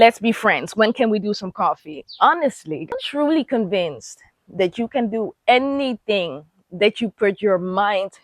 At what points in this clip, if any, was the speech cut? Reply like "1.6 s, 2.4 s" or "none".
2.9 s